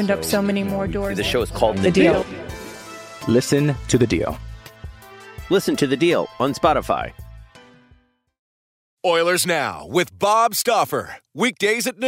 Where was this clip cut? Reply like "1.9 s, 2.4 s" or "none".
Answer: 8.7 s

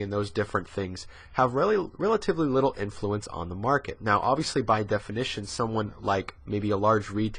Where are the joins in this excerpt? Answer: 6.4 s

